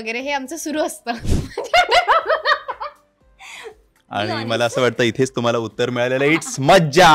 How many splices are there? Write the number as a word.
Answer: one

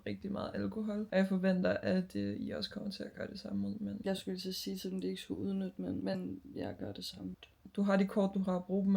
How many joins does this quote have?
one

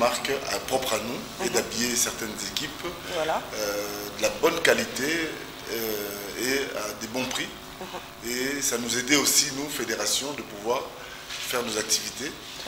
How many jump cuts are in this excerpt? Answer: zero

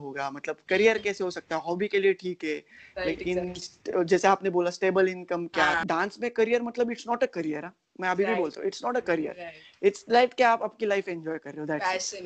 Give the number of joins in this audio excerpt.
one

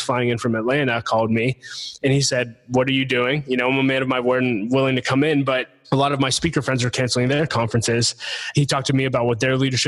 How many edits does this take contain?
one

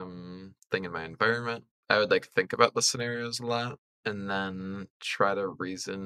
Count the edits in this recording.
one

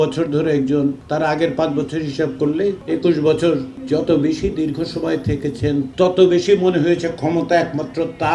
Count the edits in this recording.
four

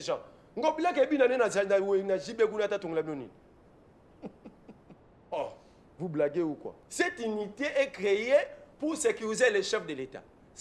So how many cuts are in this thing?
one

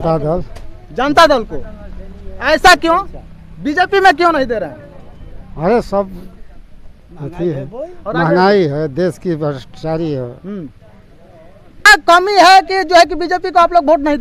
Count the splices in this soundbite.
one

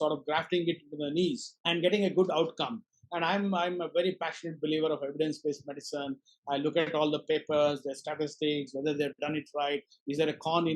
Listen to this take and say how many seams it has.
one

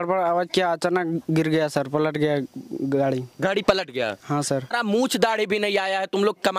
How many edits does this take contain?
one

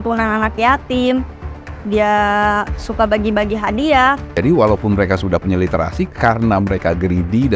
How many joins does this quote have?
one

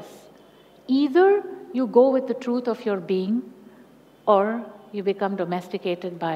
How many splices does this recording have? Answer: zero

